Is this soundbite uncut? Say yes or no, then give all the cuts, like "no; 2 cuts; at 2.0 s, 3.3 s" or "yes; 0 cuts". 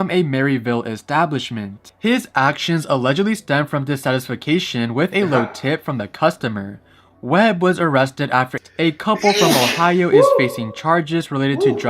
no; 1 cut; at 8.6 s